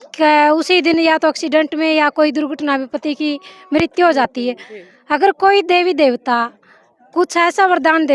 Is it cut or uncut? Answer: uncut